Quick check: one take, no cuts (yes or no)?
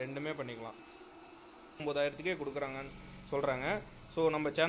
no